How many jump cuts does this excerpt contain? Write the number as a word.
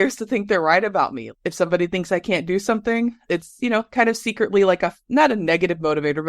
two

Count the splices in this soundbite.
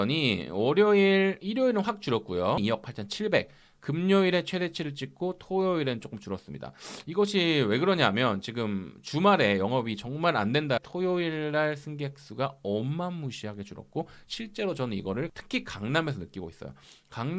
three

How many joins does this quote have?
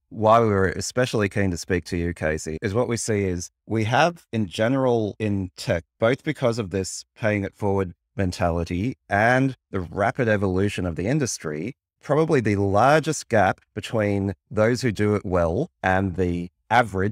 zero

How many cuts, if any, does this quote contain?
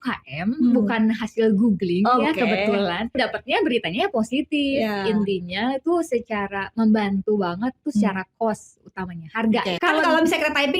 two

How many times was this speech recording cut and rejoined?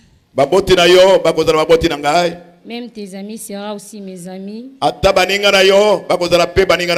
zero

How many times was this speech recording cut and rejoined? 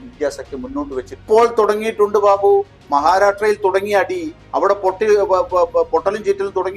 one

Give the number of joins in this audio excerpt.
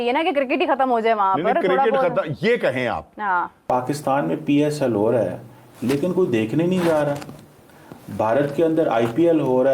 one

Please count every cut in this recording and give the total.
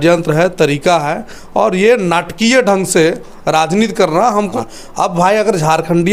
one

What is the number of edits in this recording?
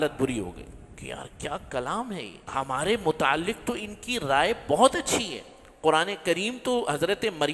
one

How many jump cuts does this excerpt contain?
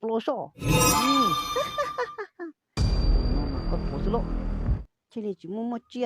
one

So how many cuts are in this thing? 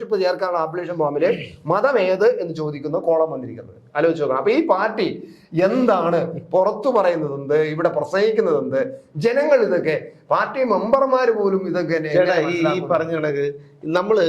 zero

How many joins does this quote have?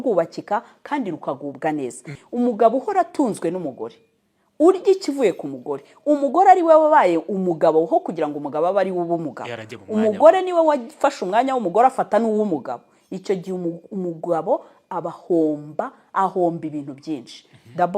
one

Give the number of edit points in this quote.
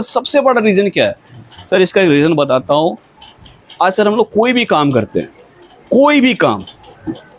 zero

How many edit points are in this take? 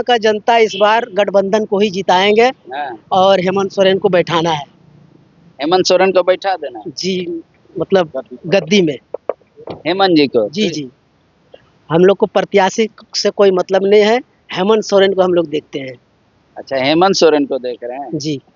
zero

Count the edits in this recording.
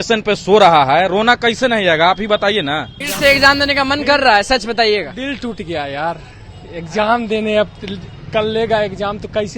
one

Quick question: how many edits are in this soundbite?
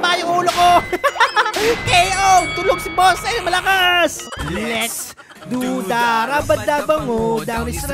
one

